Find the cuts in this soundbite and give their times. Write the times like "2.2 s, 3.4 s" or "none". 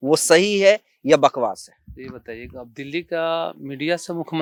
none

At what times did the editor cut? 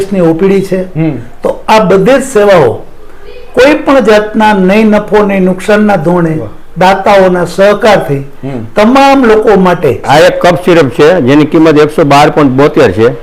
10.0 s

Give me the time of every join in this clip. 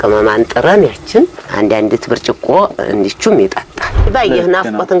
1.4 s, 4.1 s

